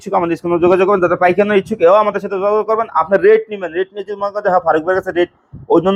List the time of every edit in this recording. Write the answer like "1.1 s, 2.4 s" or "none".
none